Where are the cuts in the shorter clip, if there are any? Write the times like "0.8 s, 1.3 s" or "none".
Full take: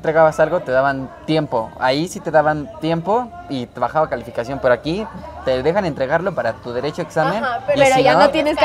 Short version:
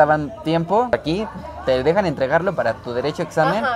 0.9 s